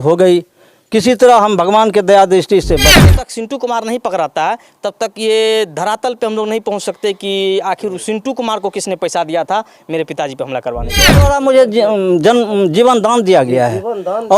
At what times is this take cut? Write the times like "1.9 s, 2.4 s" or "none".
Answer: 3.0 s, 11.2 s